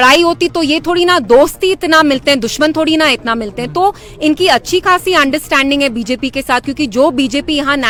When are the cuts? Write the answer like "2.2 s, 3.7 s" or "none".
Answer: none